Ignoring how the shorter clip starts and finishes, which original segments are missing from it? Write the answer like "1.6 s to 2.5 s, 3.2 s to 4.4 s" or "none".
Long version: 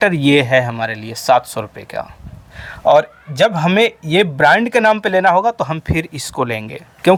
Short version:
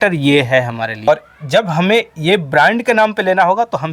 1.1 s to 2.9 s